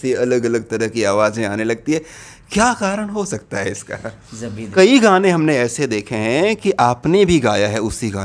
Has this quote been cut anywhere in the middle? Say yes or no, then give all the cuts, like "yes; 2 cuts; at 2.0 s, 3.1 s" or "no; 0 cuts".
yes; 1 cut; at 4.7 s